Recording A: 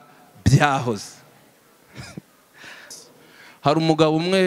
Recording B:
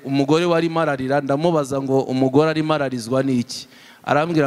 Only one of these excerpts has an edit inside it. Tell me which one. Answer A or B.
A